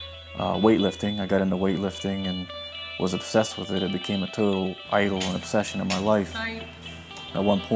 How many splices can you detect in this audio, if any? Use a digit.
0